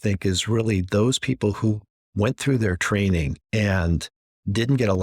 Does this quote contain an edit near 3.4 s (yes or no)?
yes